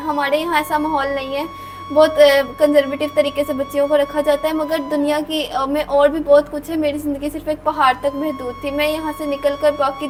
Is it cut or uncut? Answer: uncut